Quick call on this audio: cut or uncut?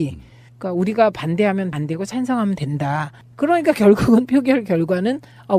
cut